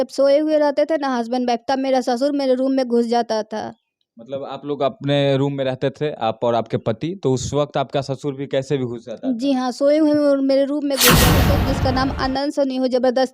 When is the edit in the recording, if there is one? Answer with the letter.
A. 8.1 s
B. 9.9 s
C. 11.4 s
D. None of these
C